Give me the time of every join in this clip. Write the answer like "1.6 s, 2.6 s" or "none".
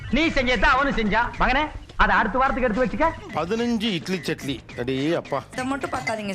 3.2 s, 5.3 s